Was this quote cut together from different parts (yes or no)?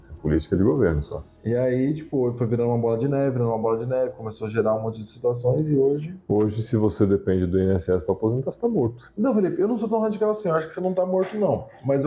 no